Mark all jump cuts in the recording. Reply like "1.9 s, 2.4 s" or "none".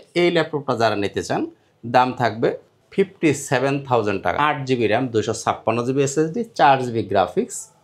4.4 s